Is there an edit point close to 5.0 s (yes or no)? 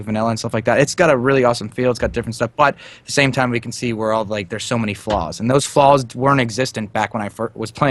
yes